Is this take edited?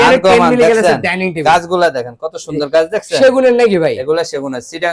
no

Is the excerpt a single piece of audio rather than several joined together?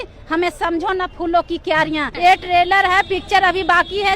no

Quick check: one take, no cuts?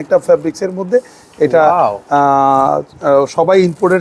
yes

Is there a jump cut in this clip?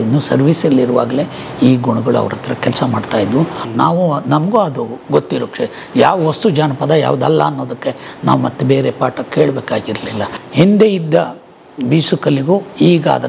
yes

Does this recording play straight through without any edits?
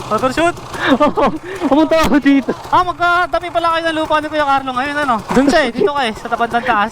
no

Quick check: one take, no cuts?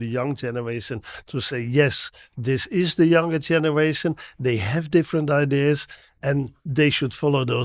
no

